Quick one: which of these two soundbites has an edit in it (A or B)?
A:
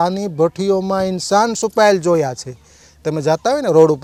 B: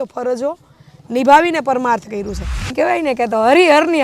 B